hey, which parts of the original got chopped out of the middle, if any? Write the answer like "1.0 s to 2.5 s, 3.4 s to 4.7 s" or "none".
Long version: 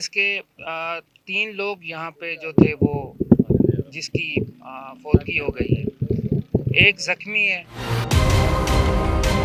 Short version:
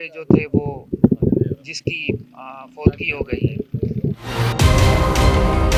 6.4 s to 7.7 s